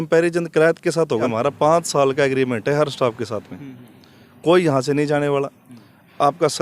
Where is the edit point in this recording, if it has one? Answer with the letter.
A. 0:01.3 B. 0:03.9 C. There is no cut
A